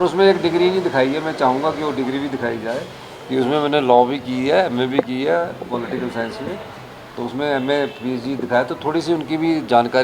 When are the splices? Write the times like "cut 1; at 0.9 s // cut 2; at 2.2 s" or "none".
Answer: none